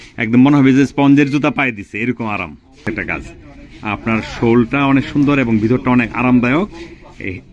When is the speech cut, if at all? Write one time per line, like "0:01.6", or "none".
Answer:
0:02.9